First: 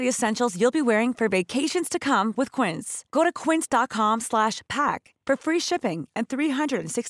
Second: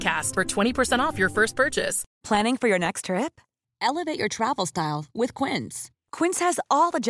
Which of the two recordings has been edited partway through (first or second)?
second